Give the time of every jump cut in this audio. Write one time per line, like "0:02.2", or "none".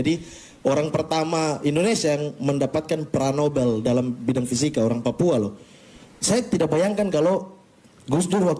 none